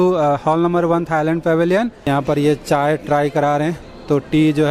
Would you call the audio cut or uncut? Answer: cut